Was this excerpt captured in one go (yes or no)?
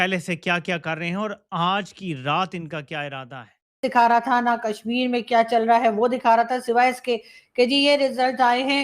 no